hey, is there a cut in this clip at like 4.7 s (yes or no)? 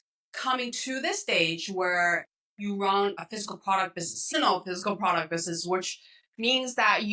no